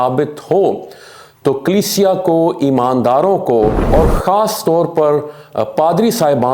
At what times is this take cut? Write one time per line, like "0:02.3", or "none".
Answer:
0:03.8